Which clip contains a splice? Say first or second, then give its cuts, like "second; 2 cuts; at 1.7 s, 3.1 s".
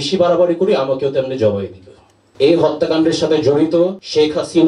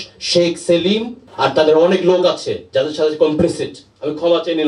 first; 1 cut; at 2.2 s